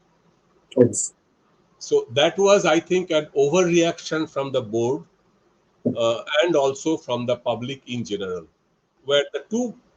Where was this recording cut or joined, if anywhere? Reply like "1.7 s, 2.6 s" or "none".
9.0 s